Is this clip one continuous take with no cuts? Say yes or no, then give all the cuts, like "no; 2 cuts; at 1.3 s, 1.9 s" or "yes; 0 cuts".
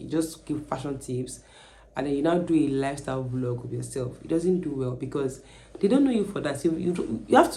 yes; 0 cuts